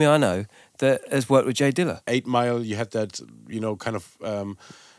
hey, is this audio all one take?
no; 1 cut; at 2.0 s

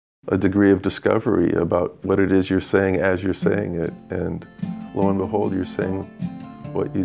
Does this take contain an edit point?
no; 0 cuts

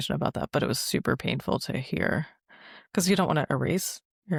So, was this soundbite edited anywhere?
no; 0 cuts

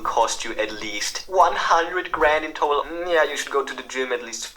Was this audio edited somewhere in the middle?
yes; 1 cut; at 2.8 s

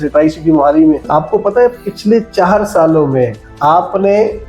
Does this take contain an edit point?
yes; 1 cut; at 1.0 s

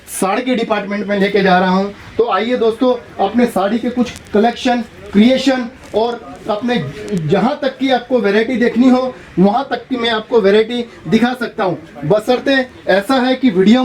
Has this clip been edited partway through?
no; 0 cuts

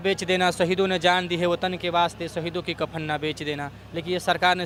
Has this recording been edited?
no; 0 cuts

